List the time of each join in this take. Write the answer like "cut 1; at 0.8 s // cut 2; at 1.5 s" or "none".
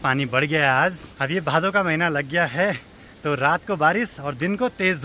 none